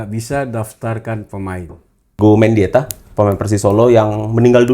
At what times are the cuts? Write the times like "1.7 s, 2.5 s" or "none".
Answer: 2.2 s